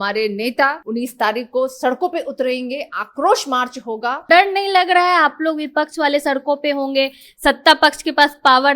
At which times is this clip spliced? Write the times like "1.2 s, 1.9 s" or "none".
0.8 s, 4.2 s